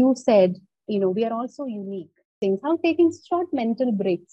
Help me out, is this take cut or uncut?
cut